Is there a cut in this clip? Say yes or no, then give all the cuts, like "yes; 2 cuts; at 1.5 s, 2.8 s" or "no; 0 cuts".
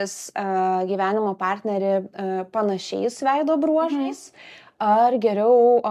no; 0 cuts